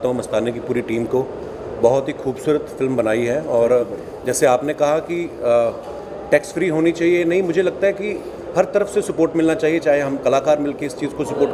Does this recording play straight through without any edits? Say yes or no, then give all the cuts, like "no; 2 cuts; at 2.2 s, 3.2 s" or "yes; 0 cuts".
yes; 0 cuts